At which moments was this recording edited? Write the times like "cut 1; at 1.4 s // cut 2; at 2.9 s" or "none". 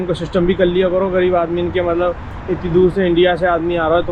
none